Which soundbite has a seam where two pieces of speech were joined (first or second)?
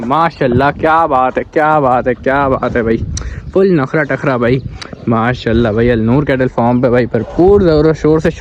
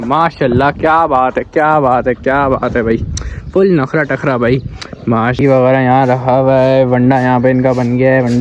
second